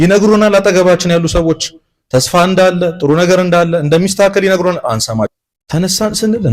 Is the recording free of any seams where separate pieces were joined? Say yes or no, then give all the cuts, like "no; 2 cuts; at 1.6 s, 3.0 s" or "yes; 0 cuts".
no; 1 cut; at 5.3 s